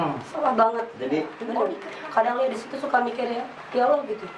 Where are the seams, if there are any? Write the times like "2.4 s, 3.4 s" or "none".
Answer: 1.4 s